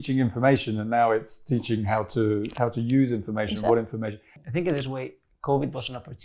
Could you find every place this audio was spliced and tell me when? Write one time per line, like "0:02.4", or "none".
0:04.3

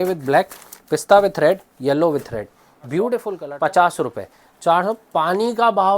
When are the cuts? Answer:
0:03.4

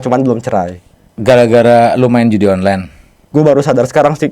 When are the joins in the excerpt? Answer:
0:01.1
0:03.2

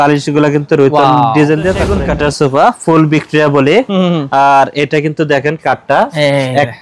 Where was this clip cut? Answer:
0:01.9

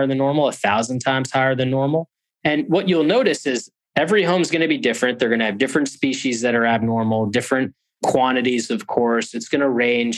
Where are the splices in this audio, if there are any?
none

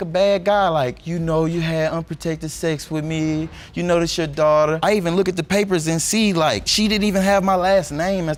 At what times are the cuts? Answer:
none

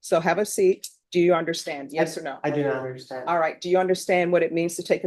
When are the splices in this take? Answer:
0:00.9

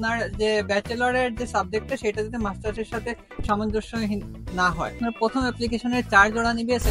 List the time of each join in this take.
0:05.0

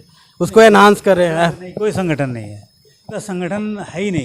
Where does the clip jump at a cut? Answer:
0:03.2

